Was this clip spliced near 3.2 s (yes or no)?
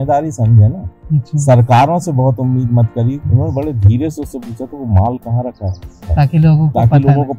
yes